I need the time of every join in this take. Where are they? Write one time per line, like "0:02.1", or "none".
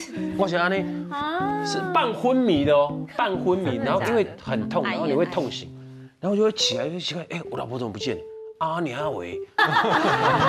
0:09.6